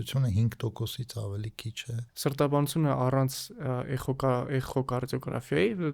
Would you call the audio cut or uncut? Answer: cut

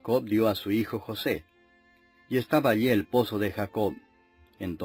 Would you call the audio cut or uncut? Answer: uncut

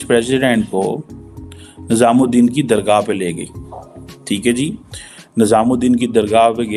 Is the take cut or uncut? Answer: uncut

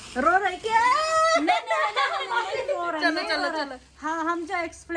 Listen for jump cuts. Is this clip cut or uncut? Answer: uncut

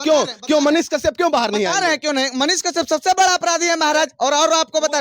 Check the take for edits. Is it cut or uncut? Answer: uncut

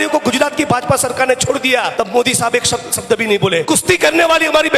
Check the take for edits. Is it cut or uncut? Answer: cut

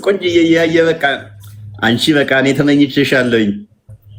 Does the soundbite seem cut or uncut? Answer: uncut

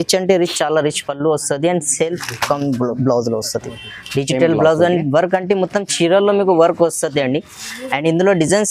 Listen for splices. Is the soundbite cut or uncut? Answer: uncut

